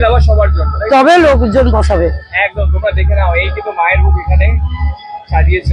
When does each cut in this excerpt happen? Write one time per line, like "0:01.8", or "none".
none